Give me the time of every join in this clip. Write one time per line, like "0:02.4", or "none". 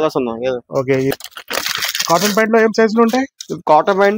0:01.1